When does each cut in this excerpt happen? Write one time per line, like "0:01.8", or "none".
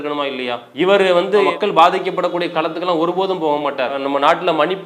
none